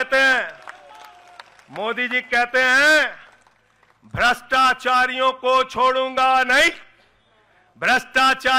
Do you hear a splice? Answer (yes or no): no